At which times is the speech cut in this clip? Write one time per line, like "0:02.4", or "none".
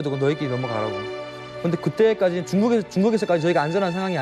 none